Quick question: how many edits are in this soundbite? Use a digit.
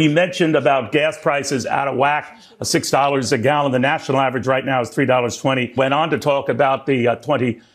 1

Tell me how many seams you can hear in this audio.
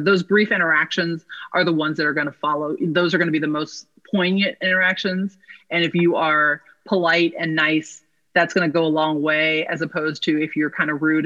0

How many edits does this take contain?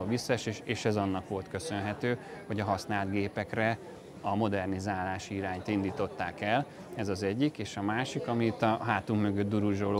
0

